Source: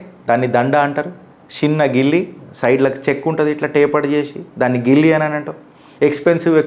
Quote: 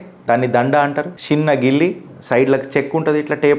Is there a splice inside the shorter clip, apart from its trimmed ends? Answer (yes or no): yes